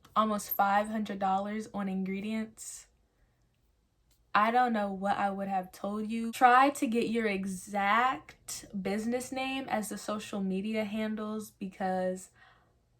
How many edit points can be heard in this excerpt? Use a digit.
1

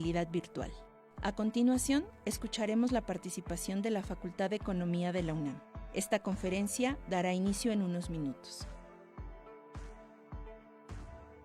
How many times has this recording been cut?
1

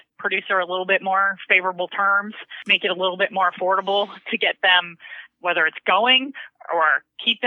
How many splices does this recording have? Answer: 1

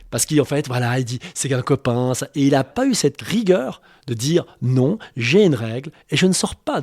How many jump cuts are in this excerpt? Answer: 2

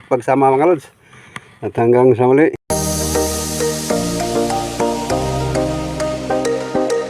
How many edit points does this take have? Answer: 1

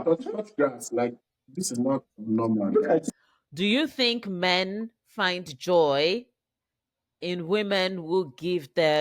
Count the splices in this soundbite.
1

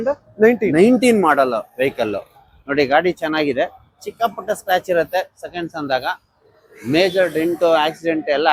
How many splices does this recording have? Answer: 0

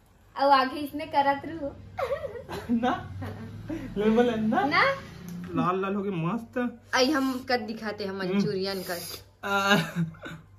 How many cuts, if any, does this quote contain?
1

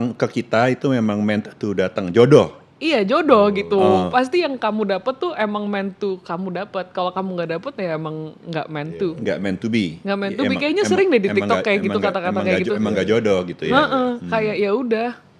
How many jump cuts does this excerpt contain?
0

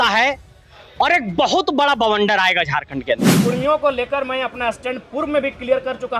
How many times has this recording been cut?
1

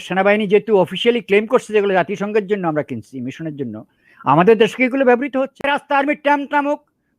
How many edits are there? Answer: 1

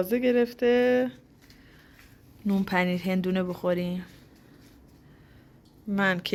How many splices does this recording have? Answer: 0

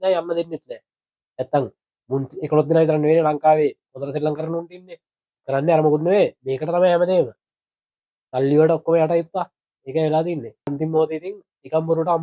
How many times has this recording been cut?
2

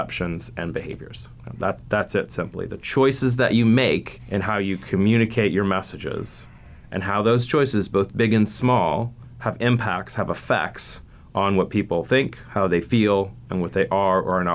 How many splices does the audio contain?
2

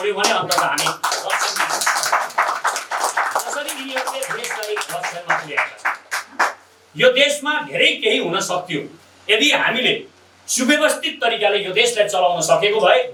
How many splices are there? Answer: 0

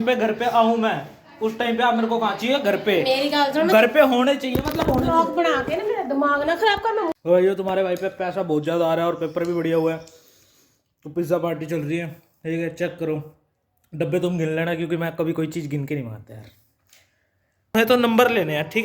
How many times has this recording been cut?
2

